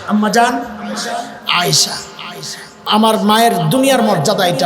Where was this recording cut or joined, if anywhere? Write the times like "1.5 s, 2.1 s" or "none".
2.9 s